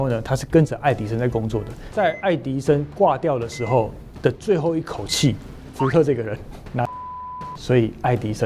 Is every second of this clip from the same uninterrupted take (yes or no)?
no